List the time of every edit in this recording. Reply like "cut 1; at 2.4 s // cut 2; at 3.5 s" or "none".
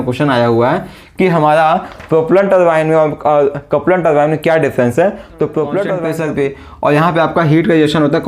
cut 1; at 6.0 s